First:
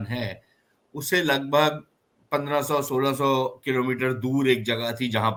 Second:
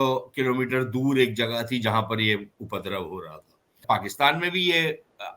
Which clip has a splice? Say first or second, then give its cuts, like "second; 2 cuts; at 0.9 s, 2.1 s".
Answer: second; 1 cut; at 3.7 s